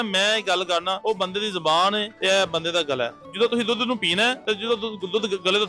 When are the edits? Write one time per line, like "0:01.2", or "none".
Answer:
0:01.0
0:02.1
0:03.2
0:04.4